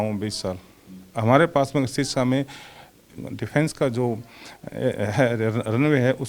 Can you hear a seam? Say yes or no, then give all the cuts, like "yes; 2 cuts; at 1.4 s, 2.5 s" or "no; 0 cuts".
yes; 1 cut; at 3.1 s